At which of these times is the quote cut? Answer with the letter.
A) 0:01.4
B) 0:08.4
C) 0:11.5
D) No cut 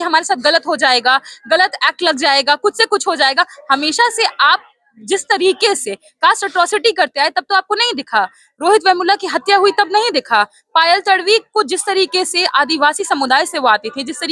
D